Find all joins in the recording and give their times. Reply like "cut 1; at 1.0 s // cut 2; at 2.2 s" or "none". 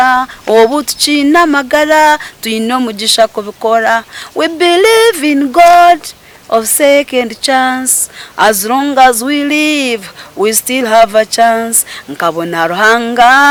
none